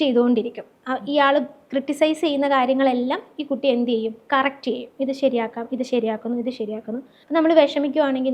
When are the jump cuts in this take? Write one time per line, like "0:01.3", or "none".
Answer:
0:07.1